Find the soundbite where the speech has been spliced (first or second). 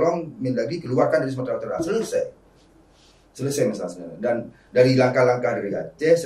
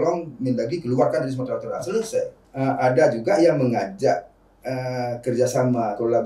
second